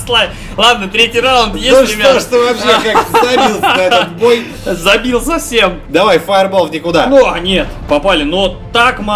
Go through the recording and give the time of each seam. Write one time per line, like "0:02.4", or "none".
0:05.8